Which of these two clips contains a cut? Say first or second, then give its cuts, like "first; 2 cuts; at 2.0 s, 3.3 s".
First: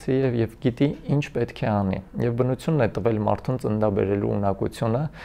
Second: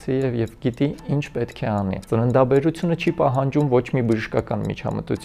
second; 1 cut; at 2.0 s